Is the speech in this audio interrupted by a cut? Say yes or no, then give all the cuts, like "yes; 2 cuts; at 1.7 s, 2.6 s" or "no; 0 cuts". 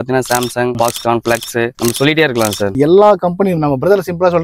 yes; 1 cut; at 2.8 s